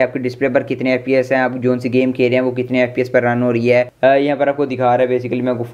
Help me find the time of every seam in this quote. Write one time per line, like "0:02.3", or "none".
0:03.9